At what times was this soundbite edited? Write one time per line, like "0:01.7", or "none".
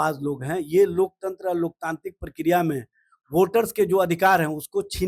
none